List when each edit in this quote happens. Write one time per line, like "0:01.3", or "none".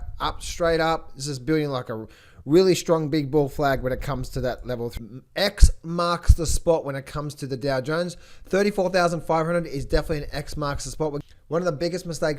0:05.0
0:11.2

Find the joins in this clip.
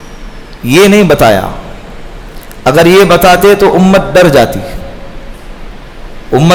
none

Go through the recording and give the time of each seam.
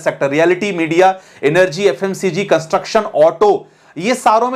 none

